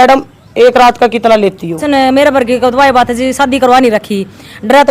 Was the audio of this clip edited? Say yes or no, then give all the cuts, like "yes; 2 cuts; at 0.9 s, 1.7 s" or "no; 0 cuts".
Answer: yes; 1 cut; at 1.8 s